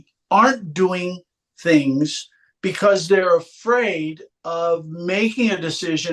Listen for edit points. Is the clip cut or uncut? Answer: uncut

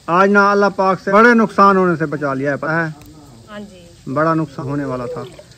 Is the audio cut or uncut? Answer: cut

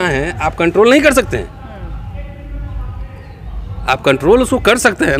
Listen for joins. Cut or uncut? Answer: uncut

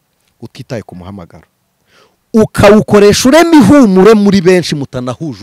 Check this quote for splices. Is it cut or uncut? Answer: uncut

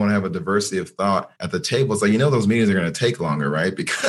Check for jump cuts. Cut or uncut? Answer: uncut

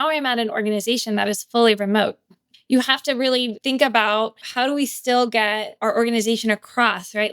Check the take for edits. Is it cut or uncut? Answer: cut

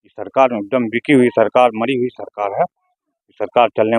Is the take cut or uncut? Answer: uncut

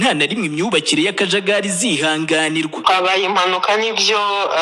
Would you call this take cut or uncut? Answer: uncut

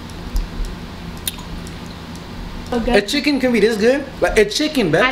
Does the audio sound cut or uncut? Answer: cut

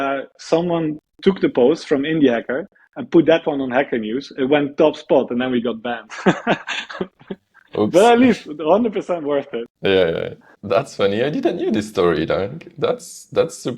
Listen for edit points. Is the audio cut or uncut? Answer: cut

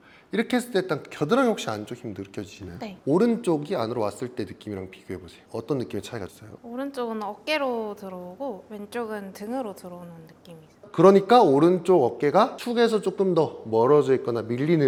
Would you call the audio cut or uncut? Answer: uncut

